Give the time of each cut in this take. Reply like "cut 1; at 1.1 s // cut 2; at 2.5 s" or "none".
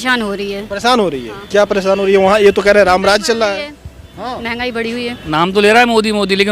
cut 1; at 5.1 s